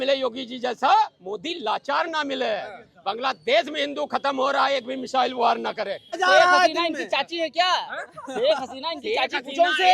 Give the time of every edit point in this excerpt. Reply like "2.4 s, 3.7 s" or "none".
6.1 s

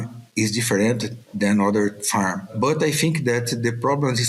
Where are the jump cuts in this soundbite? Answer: 2.5 s

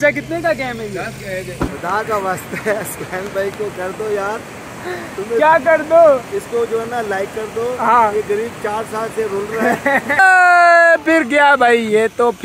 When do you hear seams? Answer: 1.7 s, 10.2 s

